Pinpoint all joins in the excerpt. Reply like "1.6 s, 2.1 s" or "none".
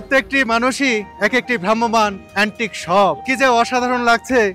1.1 s, 2.2 s, 3.2 s